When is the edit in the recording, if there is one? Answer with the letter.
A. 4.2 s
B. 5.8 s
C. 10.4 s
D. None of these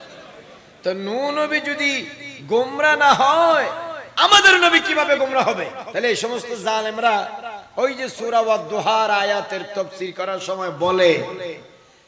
B